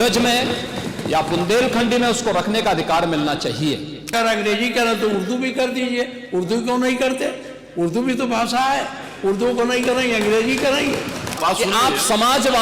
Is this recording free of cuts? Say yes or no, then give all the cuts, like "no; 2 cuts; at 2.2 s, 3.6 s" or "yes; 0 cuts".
no; 2 cuts; at 4.1 s, 11.3 s